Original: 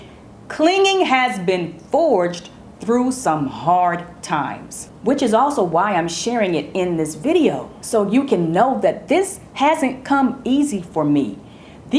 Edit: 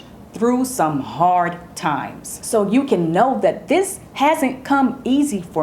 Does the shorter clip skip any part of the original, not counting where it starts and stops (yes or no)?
yes